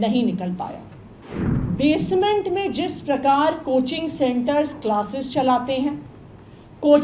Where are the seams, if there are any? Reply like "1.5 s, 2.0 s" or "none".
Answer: 1.5 s